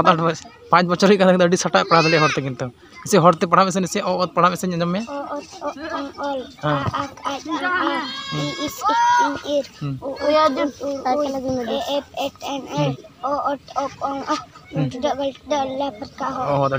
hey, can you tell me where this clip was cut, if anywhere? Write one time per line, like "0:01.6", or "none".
none